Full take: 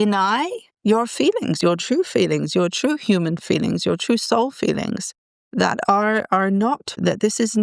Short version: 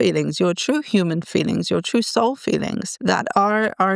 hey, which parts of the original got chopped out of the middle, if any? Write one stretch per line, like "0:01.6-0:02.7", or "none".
0:05.0-0:05.4